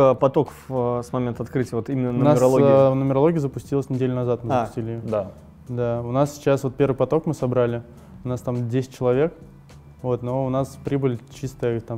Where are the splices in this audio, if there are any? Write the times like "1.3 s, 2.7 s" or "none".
none

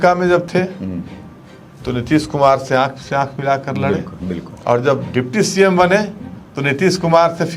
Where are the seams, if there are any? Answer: none

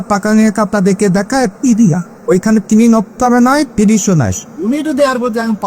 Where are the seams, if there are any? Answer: 2.1 s, 4.5 s

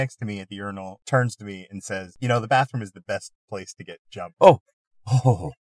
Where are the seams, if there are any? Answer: 0.9 s, 2.1 s

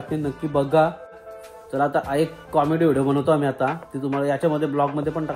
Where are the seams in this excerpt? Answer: 1.3 s

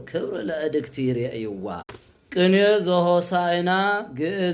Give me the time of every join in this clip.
1.8 s

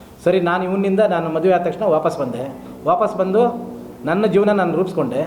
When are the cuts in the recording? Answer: none

